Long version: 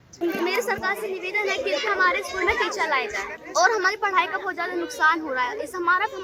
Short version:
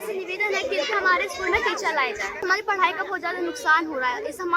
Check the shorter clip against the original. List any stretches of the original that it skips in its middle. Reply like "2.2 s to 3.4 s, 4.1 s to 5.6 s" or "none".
3.4 s to 3.8 s